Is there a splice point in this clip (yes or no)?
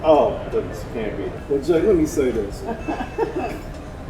yes